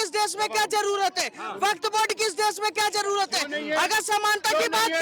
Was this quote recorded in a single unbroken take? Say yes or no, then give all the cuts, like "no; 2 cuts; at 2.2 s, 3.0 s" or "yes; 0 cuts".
yes; 0 cuts